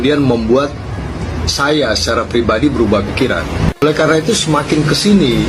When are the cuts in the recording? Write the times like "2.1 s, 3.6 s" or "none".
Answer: 3.6 s